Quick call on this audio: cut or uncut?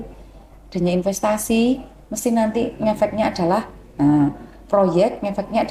uncut